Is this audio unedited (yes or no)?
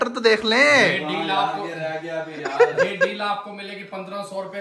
yes